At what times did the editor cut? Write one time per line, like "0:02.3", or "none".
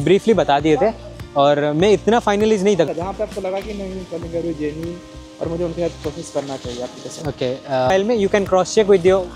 0:02.9
0:07.9